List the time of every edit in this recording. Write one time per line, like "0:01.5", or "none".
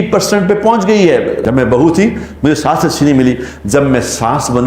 0:01.4